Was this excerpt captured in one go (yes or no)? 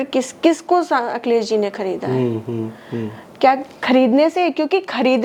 yes